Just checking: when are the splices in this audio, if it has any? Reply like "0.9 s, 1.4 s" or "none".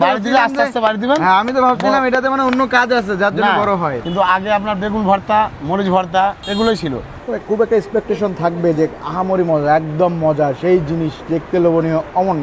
4.0 s, 6.4 s, 7.1 s